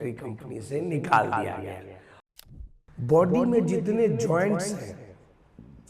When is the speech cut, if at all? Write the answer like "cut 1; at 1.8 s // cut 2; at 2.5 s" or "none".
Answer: cut 1; at 2.3 s